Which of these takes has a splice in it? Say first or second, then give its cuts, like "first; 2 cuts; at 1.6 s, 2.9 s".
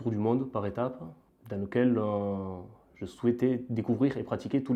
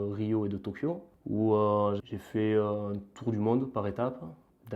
second; 1 cut; at 2.0 s